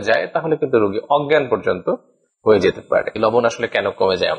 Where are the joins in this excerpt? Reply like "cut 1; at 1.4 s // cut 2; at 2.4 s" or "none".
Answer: cut 1; at 3.2 s